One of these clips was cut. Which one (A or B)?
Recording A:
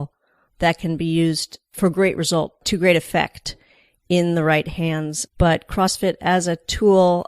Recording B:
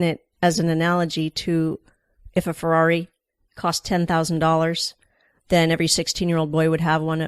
A